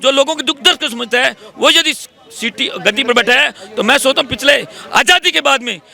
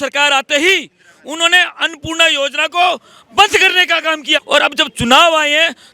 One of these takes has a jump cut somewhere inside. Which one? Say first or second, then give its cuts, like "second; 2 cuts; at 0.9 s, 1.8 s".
second; 1 cut; at 4.4 s